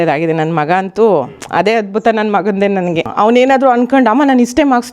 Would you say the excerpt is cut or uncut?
cut